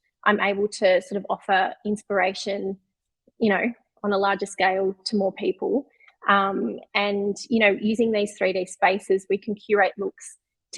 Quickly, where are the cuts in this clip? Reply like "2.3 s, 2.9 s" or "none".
none

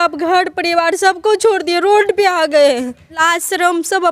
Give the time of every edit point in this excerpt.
3.2 s

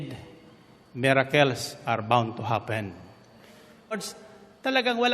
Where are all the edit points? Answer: 4.0 s

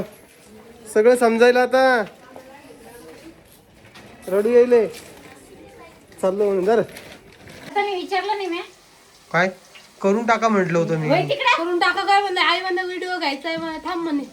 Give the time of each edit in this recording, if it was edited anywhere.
7.7 s

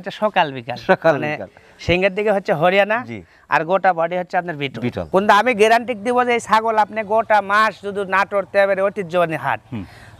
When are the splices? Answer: 5.0 s

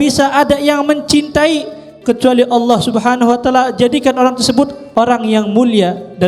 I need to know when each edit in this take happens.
4.8 s

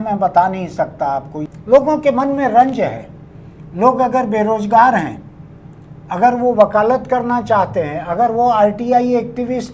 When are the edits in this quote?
1.4 s

